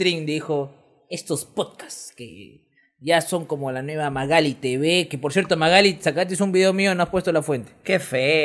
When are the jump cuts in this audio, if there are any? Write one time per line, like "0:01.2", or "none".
none